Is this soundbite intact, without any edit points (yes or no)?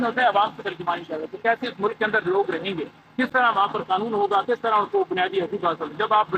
yes